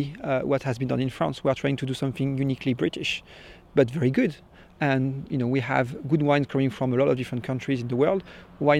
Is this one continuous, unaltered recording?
no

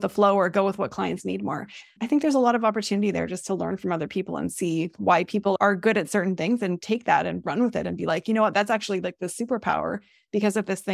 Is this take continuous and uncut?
yes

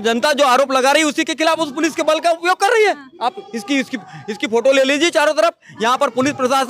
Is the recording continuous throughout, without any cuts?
yes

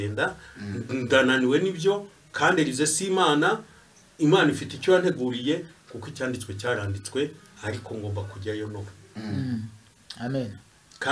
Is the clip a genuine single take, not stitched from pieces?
yes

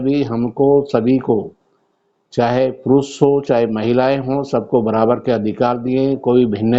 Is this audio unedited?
yes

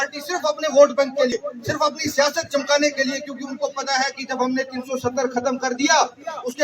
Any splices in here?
yes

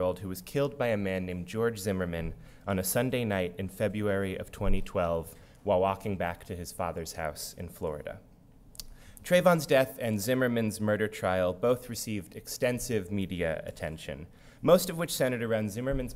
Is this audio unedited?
yes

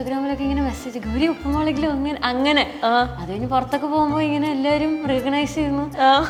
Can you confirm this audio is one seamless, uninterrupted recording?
yes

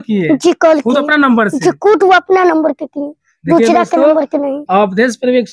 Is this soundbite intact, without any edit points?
yes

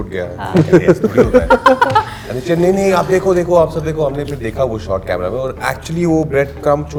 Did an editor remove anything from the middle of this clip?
no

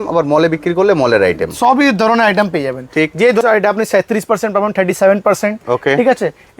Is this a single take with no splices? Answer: no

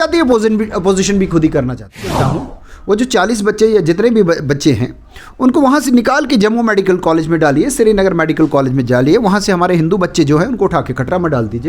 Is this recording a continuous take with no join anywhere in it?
no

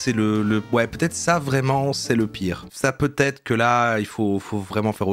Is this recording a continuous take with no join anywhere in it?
yes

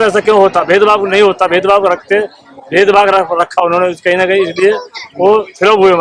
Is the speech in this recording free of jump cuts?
yes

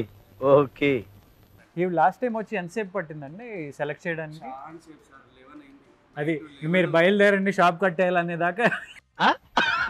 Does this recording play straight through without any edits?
no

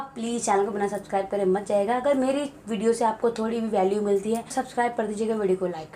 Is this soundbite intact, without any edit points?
no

